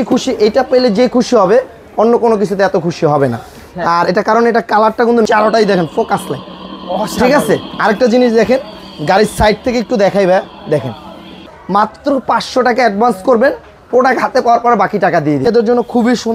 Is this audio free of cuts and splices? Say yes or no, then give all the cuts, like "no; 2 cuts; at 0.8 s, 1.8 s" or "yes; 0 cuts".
no; 3 cuts; at 5.3 s, 11.5 s, 15.5 s